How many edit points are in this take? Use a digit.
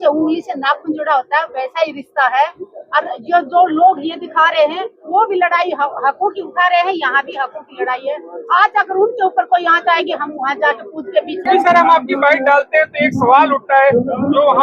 1